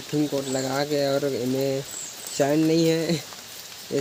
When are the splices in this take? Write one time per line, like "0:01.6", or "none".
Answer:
none